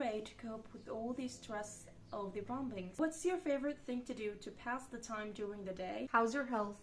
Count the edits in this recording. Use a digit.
2